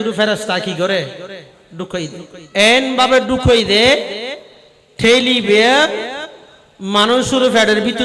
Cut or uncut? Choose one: cut